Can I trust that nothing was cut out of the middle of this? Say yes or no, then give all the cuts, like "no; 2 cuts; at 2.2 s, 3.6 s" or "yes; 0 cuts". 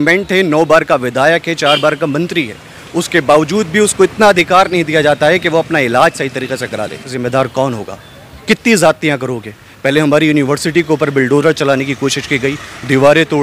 no; 1 cut; at 7.2 s